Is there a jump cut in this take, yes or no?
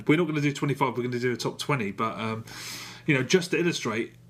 no